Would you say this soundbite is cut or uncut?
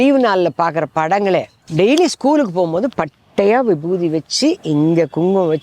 cut